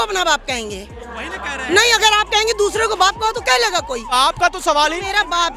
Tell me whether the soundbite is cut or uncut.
cut